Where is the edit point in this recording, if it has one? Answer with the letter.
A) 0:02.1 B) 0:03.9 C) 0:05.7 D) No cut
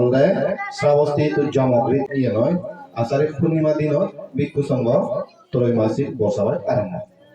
A